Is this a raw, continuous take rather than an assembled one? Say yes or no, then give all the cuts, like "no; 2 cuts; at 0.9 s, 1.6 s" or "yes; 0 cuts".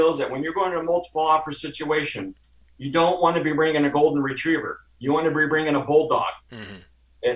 yes; 0 cuts